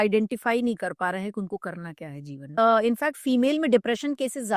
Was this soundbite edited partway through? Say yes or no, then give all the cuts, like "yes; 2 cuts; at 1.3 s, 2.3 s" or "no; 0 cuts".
yes; 1 cut; at 2.5 s